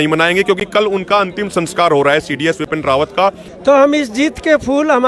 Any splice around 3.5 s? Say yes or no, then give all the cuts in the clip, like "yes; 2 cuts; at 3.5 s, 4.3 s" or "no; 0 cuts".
yes; 1 cut; at 3.5 s